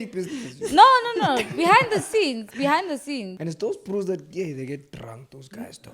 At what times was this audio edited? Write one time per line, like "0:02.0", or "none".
0:03.3